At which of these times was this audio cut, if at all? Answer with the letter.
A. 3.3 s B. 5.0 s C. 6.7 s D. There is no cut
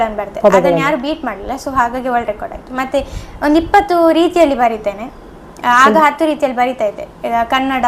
D